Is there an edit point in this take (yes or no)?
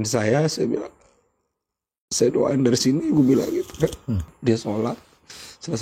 yes